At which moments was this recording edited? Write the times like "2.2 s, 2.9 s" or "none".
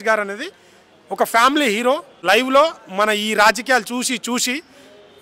2.1 s